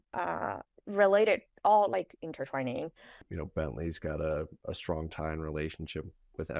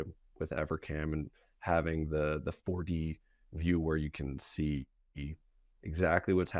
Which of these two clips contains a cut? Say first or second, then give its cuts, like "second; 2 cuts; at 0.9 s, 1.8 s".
first; 1 cut; at 3.2 s